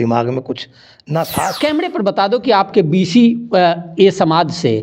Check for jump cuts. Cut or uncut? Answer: cut